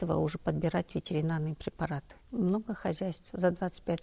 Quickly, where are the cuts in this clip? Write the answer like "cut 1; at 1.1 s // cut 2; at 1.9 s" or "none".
cut 1; at 2.1 s